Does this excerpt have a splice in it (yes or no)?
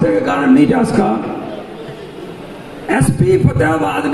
no